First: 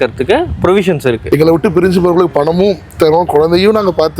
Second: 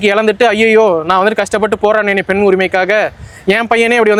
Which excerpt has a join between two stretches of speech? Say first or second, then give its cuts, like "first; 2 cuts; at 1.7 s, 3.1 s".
first; 1 cut; at 1.2 s